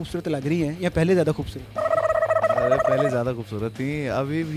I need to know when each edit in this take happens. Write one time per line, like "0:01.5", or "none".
none